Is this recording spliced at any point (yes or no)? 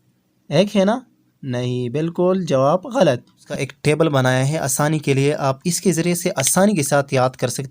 yes